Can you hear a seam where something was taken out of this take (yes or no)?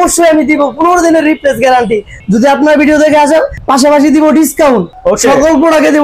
yes